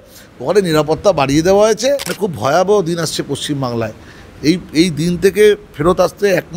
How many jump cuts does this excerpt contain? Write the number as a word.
one